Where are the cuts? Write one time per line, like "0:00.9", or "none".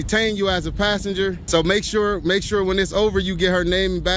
0:01.4